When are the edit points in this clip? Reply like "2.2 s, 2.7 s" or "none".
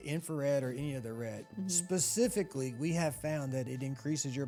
none